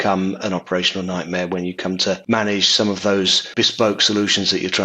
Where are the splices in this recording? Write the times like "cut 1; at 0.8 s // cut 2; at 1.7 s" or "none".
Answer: cut 1; at 2.2 s // cut 2; at 3.5 s